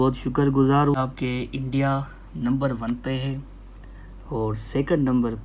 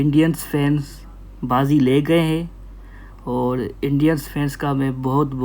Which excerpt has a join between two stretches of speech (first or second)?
first